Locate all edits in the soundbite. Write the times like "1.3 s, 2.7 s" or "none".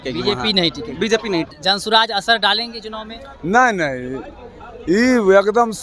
1.5 s